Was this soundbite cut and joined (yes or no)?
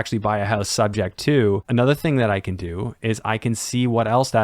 yes